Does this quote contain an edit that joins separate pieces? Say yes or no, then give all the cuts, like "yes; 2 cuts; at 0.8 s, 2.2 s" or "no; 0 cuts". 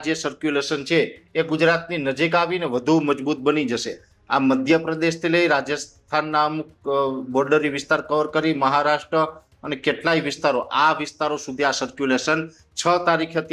no; 0 cuts